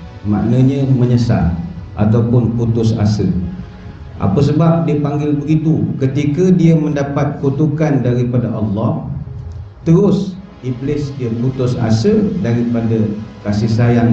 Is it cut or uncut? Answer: uncut